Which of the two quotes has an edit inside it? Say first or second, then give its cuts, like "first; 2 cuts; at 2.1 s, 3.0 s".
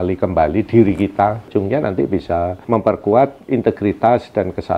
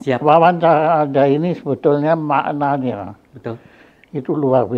first; 3 cuts; at 1.5 s, 2.6 s, 3.4 s